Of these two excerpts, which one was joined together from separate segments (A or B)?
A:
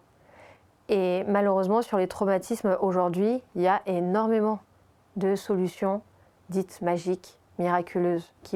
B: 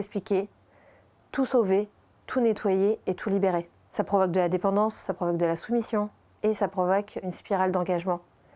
B